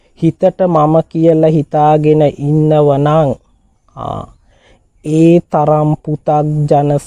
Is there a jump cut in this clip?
no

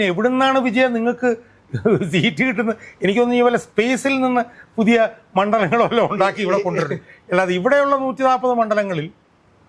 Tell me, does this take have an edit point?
no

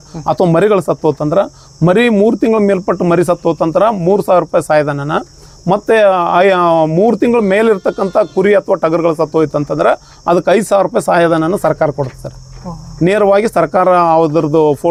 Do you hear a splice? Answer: no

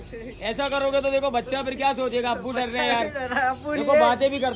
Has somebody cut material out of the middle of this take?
no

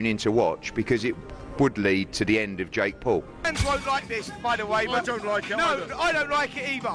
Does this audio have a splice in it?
yes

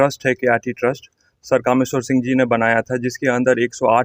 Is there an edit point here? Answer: no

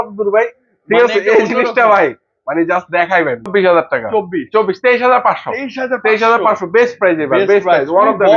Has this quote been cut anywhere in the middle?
yes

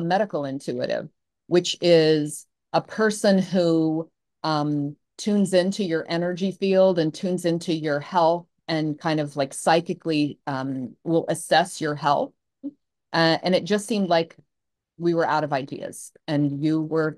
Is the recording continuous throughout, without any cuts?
no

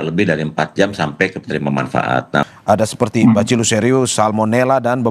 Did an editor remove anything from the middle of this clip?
yes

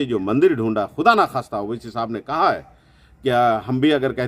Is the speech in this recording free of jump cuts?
yes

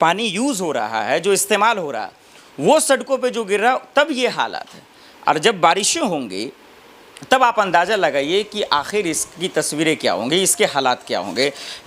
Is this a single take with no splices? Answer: yes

